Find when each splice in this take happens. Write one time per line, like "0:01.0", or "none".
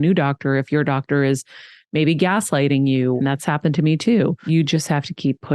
0:03.2
0:04.4